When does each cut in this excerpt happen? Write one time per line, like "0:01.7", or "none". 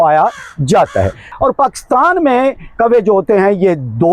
0:01.2